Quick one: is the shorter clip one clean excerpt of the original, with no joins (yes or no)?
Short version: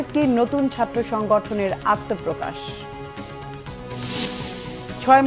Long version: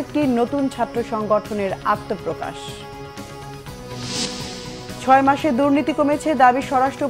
yes